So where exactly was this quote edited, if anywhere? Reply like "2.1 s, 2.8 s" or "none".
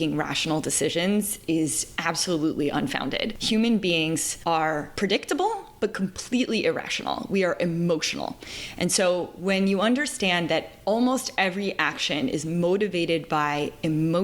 3.3 s, 4.6 s